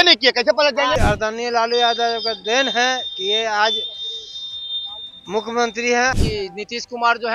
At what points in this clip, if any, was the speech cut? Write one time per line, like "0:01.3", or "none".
0:01.0
0:06.2